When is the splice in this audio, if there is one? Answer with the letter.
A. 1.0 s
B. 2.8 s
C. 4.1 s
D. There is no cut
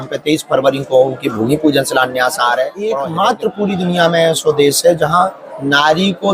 B